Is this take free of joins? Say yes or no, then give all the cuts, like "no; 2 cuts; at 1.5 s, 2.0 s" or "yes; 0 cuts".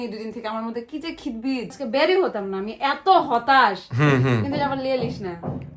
no; 1 cut; at 1.8 s